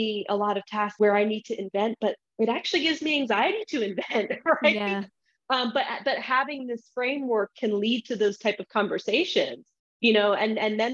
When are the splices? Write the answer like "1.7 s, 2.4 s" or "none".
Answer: 0.9 s